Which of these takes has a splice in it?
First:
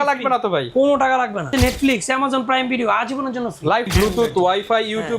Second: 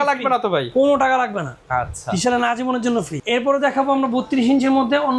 first; 2 cuts; at 1.5 s, 3.9 s

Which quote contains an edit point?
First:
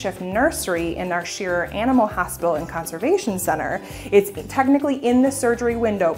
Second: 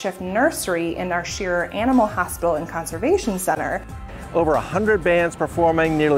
second; 1 cut; at 4.0 s

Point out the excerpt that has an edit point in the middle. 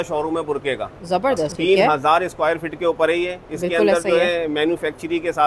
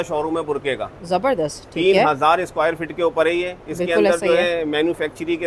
first; 1 cut; at 1.5 s

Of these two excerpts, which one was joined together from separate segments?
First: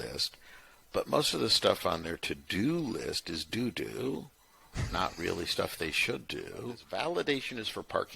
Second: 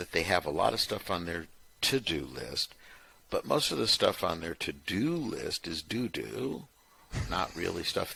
first; 1 cut; at 6.8 s

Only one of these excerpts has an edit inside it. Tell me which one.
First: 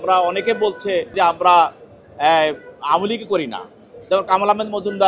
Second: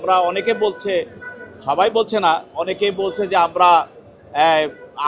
first; 1 cut; at 1.1 s

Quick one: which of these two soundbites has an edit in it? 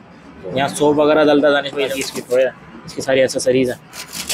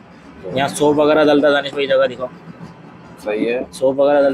first; 1 cut; at 1.9 s

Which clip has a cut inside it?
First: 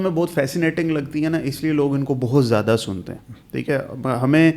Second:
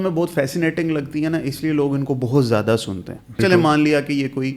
second; 1 cut; at 3.4 s

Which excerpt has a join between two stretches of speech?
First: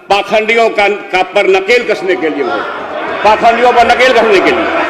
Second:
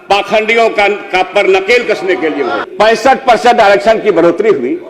second; 1 cut; at 2.6 s

